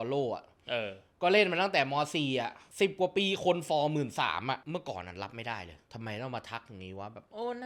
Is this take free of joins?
no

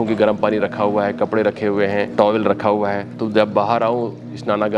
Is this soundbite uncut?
no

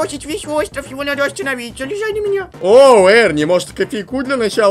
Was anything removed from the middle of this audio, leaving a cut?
yes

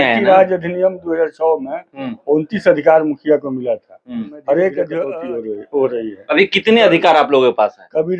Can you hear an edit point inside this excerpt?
yes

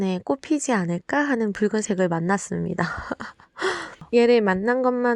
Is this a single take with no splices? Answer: no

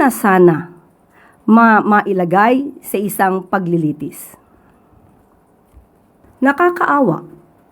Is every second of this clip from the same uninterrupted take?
no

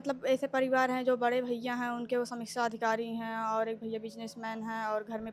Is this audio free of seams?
yes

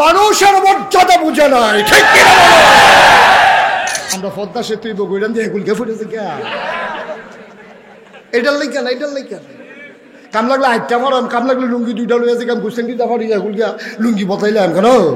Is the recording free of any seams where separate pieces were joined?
no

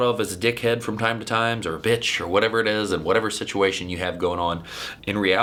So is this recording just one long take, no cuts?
yes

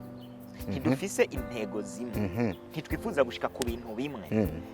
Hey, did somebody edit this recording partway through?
no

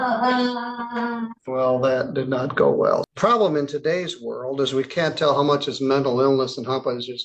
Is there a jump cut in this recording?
yes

